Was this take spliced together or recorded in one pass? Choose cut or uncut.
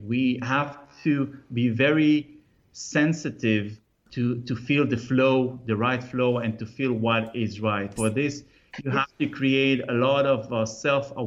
cut